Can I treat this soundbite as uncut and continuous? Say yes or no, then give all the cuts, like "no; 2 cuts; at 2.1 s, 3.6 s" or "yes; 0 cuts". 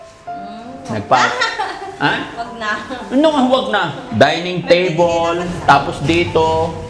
no; 1 cut; at 5.5 s